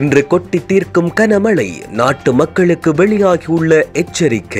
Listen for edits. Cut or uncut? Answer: uncut